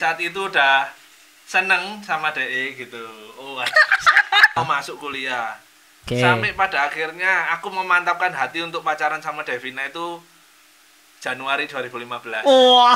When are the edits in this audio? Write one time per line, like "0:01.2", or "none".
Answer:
0:04.6